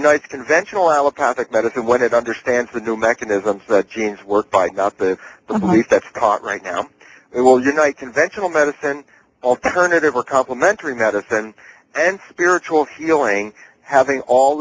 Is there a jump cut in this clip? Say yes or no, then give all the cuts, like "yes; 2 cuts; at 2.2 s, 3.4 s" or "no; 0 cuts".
no; 0 cuts